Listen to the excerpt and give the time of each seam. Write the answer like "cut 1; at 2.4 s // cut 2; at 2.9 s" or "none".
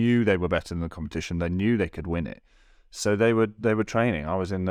none